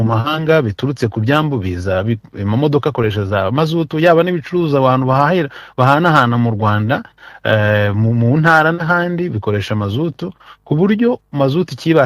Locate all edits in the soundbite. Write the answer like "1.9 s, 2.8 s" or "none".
none